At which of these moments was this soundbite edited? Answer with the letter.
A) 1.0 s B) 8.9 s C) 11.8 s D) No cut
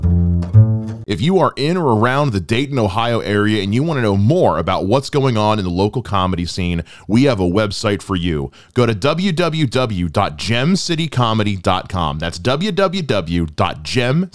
A